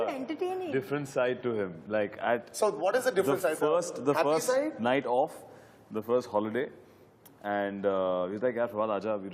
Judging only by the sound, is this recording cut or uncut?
uncut